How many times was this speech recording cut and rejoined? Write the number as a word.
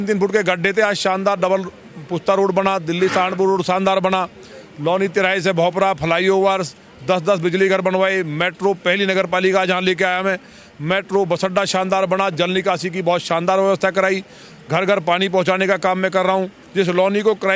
one